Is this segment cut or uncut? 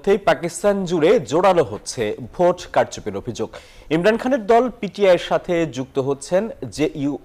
uncut